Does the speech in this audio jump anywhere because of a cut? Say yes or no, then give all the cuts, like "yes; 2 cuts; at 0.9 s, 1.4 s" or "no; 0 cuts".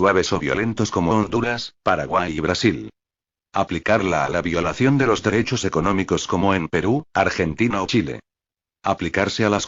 no; 0 cuts